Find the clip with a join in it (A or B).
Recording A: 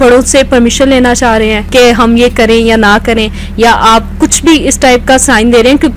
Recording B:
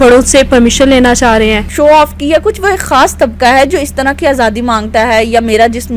B